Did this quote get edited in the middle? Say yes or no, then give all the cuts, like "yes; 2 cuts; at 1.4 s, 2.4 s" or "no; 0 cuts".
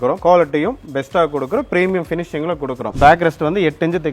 yes; 1 cut; at 2.9 s